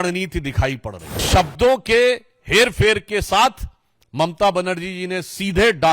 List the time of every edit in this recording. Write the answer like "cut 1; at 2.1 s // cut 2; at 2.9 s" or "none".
cut 1; at 1.2 s